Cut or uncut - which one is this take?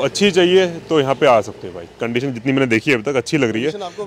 uncut